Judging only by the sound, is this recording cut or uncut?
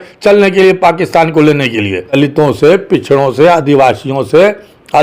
cut